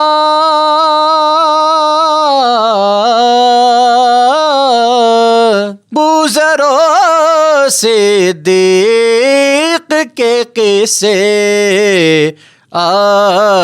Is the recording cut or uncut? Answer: cut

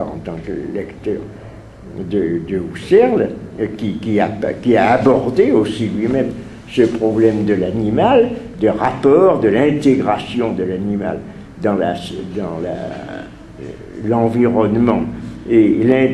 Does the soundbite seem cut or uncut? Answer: uncut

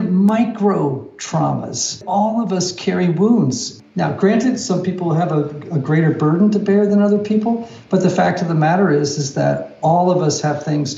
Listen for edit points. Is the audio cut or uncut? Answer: cut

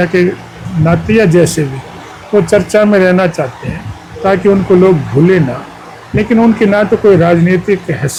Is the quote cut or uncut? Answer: uncut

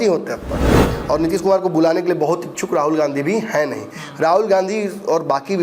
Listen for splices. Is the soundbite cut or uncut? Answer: cut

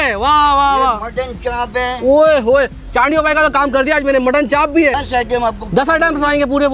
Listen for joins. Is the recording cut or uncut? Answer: cut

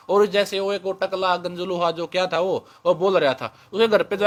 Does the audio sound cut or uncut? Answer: uncut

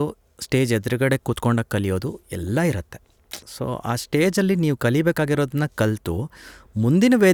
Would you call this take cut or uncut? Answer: uncut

